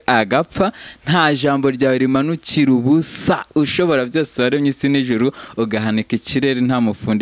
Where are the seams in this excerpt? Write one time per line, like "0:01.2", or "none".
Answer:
none